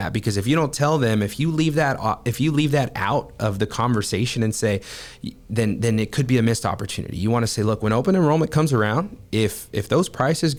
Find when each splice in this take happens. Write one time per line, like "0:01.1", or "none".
none

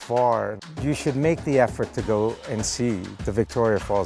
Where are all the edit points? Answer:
0:03.1

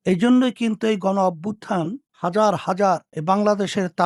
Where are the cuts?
none

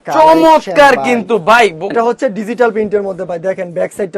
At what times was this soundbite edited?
0:01.9

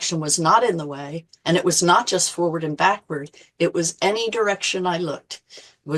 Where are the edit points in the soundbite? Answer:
none

